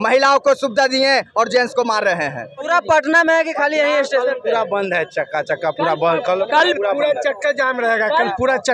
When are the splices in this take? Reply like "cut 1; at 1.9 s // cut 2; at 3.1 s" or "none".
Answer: cut 1; at 2.6 s

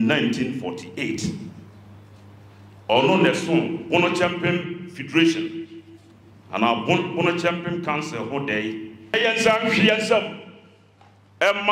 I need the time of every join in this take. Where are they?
cut 1; at 9.1 s

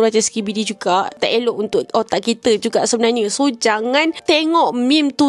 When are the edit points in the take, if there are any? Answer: cut 1; at 1.1 s // cut 2; at 4.2 s

